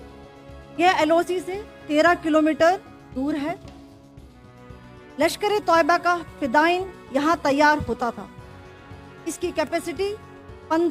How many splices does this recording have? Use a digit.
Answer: 3